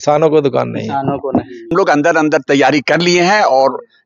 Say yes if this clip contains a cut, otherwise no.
yes